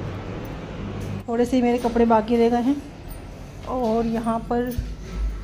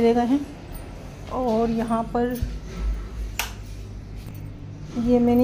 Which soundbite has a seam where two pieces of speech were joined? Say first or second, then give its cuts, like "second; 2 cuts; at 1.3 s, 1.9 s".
first; 1 cut; at 1.2 s